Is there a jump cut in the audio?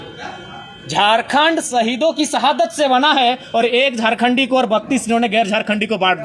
no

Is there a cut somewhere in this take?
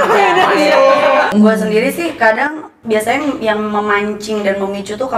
no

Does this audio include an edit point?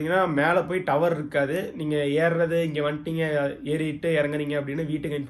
no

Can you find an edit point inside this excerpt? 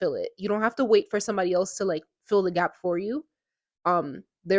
no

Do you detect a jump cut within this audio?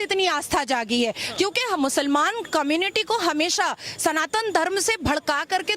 no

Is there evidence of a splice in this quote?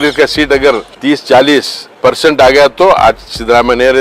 yes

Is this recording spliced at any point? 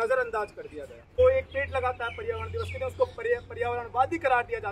yes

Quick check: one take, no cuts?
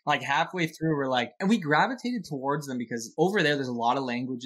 no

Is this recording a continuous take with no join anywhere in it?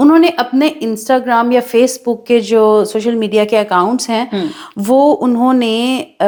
yes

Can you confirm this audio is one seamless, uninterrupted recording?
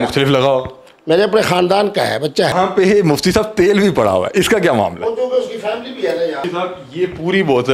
no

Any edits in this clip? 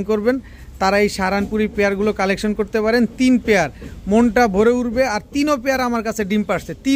no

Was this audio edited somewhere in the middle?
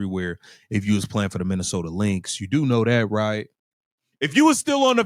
no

